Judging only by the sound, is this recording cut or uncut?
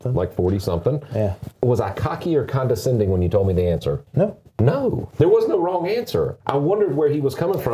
cut